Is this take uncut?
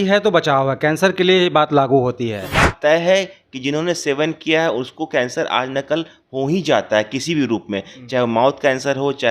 no; 1 cut; at 2.7 s

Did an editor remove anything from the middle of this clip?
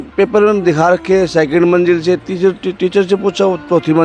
no; 0 cuts

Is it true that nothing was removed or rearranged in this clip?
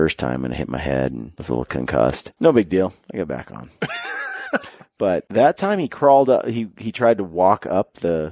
no; 4 cuts; at 1.3 s, 2.3 s, 3.0 s, 4.8 s

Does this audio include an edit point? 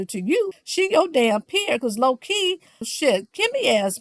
yes; 1 cut; at 2.9 s

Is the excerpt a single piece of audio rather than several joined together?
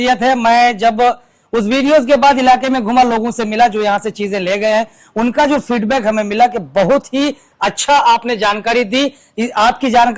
yes; 0 cuts

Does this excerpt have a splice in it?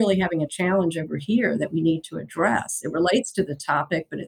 no; 0 cuts

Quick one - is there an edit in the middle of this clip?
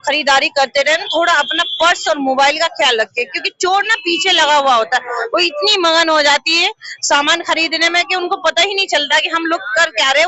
no; 0 cuts

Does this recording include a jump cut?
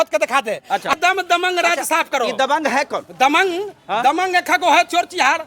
yes; 1 cut; at 0.9 s

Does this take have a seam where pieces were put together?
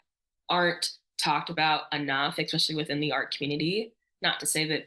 no; 0 cuts

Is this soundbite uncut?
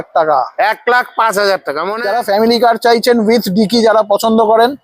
no; 1 cut; at 1.9 s

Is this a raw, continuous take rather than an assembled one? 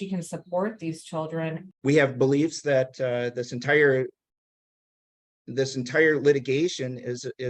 no; 1 cut; at 1.6 s

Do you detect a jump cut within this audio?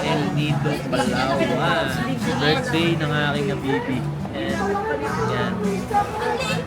no; 0 cuts

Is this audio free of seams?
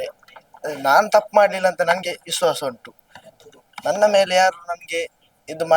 yes; 0 cuts

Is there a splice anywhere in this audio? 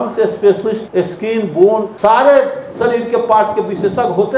yes; 2 cuts; at 0.8 s, 1.9 s

